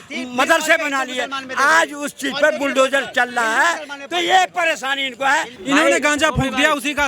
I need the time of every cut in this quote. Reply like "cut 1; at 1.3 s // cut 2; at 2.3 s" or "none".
cut 1; at 5.5 s